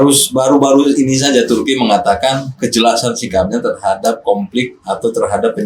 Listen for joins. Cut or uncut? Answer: uncut